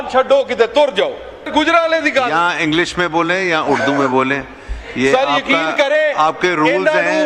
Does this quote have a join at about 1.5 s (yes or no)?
yes